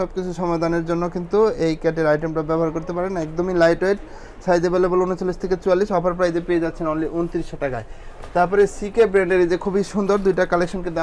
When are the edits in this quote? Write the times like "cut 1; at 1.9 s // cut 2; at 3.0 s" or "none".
none